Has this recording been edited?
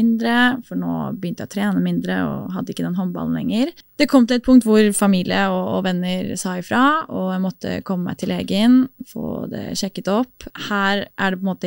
yes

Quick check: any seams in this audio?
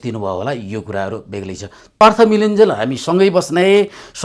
yes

